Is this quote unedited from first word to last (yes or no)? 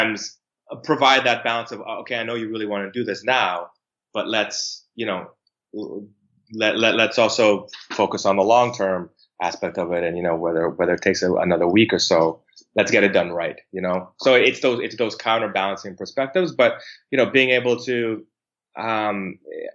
yes